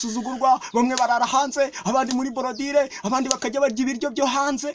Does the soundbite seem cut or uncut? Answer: uncut